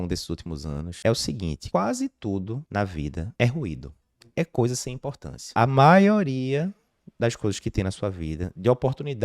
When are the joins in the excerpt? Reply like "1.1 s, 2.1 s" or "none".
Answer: 0.9 s, 1.6 s, 3.1 s, 5.5 s